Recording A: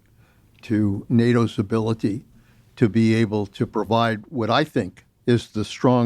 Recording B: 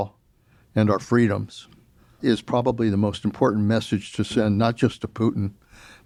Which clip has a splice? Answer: A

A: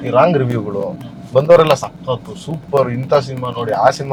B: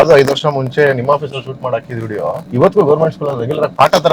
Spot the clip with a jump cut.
B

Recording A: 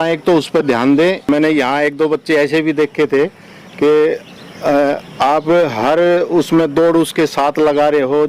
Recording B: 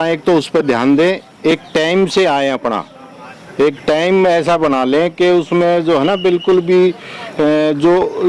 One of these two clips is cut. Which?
A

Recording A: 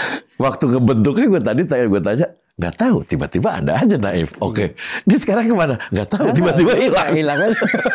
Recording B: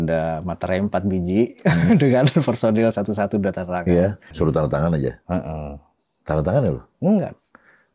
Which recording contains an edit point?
B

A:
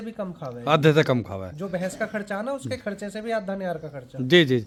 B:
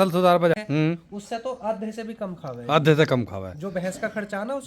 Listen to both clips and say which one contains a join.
B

